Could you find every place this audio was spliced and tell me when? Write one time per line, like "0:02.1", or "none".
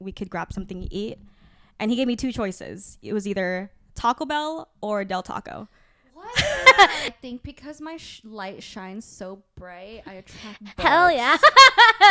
0:07.0

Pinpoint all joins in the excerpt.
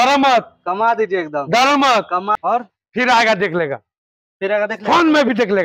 0:02.4

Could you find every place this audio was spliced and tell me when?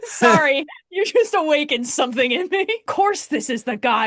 0:02.9

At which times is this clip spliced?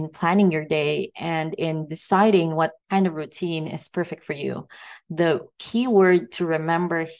0:02.8

